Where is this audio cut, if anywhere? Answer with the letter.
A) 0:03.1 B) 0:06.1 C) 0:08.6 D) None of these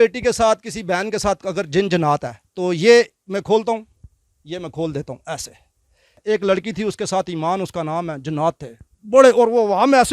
B